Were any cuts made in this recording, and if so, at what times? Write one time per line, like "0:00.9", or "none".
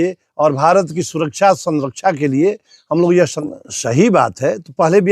0:03.4